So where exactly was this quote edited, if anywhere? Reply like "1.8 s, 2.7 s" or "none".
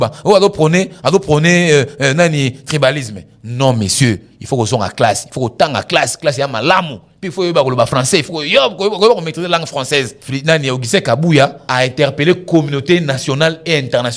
10.2 s, 11.6 s